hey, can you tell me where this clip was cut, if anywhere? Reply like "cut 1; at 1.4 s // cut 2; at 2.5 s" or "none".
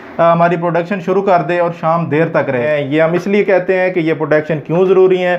cut 1; at 2.7 s